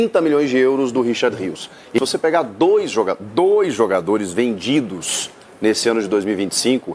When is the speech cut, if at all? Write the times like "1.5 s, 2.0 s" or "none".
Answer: 2.0 s